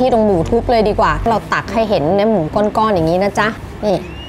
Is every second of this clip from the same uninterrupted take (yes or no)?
yes